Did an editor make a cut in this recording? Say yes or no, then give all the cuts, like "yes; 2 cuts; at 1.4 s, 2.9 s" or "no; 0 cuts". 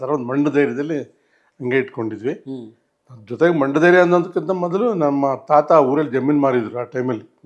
no; 0 cuts